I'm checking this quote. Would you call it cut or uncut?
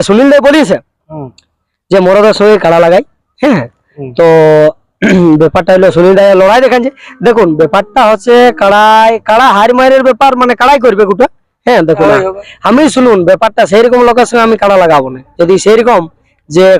cut